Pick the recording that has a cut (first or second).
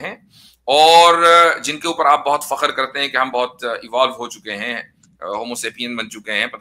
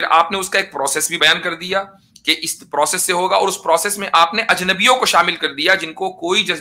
second